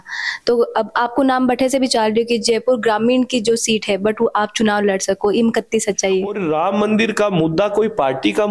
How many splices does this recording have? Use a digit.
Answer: 1